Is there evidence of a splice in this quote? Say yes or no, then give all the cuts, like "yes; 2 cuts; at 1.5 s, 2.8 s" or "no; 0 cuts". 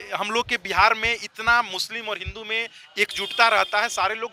no; 0 cuts